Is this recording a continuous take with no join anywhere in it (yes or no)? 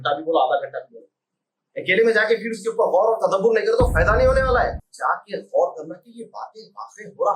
no